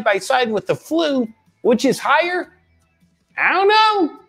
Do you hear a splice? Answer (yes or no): no